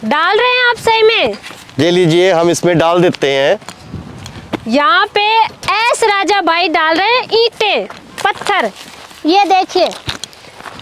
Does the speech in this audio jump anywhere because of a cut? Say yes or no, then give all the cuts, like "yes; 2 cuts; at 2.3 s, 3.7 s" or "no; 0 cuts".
yes; 1 cut; at 3.6 s